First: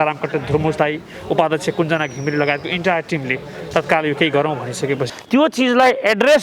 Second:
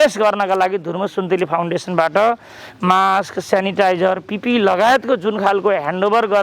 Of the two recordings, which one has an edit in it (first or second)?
first